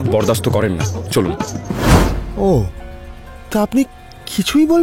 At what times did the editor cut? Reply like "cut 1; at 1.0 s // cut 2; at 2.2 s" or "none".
cut 1; at 1.9 s